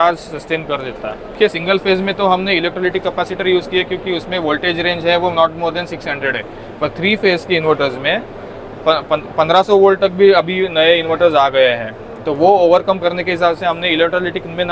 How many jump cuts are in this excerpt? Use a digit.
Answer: 1